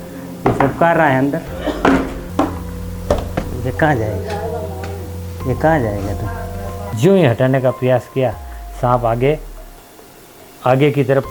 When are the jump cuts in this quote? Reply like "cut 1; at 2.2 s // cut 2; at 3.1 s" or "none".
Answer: cut 1; at 2.2 s